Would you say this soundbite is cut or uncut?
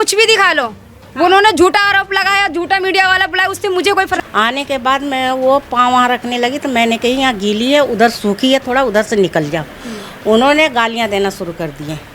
cut